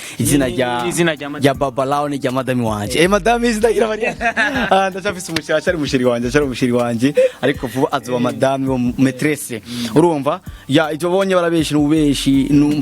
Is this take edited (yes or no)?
no